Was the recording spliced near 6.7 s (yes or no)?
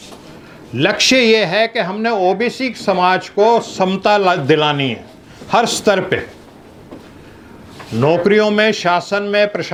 no